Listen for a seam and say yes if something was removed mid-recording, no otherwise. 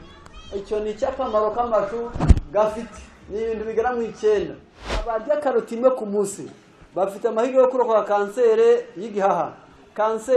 yes